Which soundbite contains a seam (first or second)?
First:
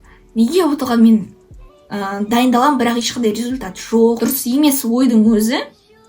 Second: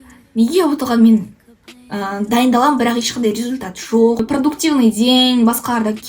second